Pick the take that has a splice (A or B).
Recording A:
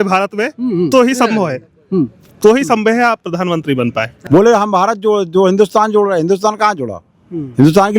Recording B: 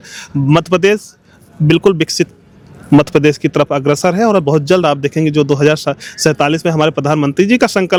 A